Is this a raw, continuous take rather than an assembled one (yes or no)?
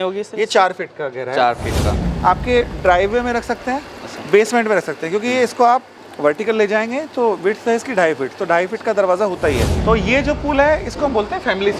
no